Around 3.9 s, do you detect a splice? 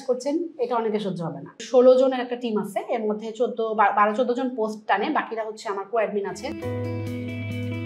no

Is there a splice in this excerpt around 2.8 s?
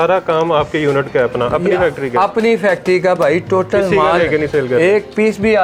no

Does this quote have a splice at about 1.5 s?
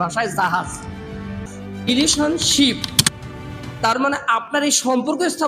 yes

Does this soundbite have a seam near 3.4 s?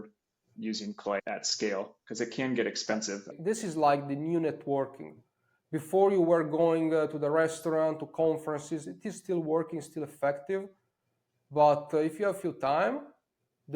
yes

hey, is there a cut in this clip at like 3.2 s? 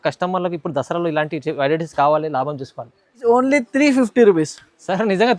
yes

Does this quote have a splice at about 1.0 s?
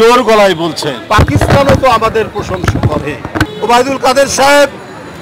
yes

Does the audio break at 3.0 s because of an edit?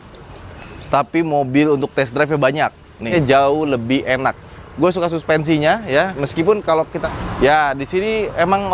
yes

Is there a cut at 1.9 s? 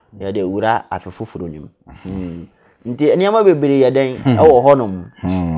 no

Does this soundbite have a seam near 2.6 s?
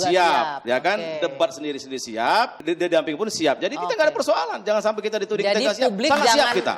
yes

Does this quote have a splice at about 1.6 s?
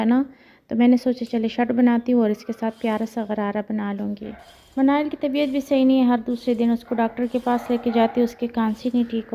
no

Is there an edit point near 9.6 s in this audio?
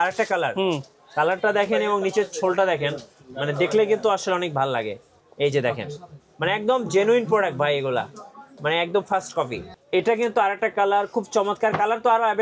yes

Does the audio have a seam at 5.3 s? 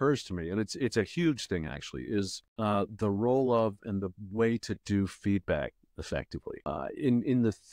no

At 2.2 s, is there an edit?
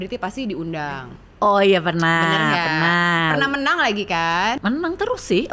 no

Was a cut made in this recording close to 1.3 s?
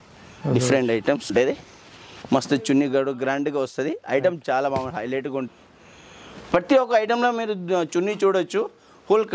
yes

